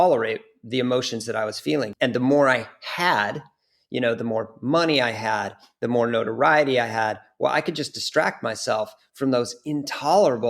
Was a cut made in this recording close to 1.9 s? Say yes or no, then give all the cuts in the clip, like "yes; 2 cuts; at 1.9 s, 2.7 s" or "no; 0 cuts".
yes; 1 cut; at 1.9 s